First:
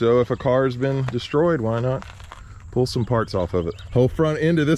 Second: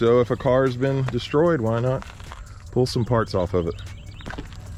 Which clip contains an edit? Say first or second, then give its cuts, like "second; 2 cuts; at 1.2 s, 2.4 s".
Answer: first; 1 cut; at 3.8 s